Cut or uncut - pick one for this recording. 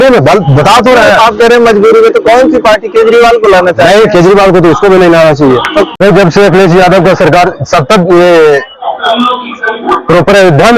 cut